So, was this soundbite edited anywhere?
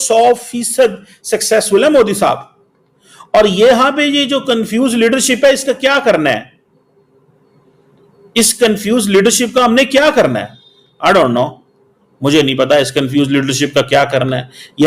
no; 0 cuts

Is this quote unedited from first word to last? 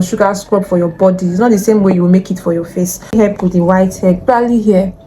no; 1 cut; at 3.1 s

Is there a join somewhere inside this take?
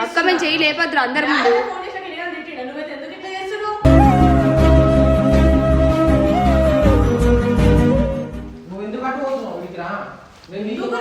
yes; 1 cut; at 8.4 s

